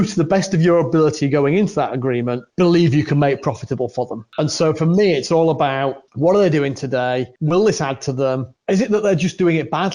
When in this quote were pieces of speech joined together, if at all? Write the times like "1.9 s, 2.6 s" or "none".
2.4 s, 4.2 s, 6.0 s, 7.3 s, 8.5 s